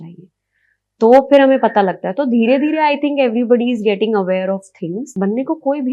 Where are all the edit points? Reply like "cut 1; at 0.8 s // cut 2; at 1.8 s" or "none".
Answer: cut 1; at 5.0 s